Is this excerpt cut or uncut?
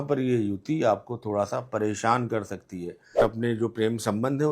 cut